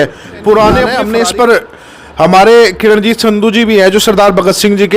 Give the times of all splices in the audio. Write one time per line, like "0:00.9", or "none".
0:01.0